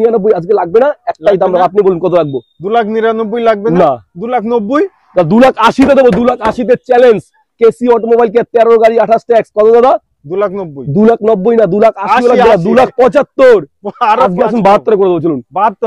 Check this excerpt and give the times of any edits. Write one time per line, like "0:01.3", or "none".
none